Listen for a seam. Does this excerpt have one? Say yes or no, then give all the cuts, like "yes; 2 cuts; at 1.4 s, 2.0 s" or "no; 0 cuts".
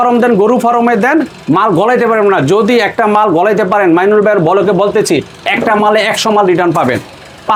no; 0 cuts